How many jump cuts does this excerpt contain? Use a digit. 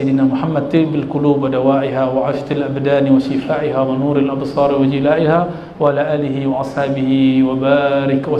0